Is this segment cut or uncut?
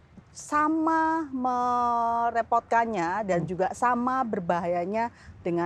uncut